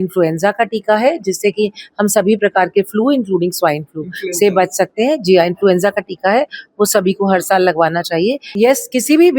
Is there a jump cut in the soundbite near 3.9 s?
no; 1 cut; at 8.4 s

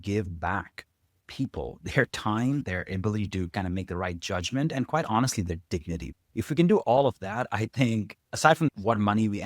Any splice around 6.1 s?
yes; 3 cuts; at 2.6 s, 6.1 s, 8.7 s

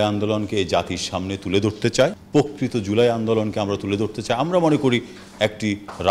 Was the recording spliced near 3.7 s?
no; 1 cut; at 2.2 s

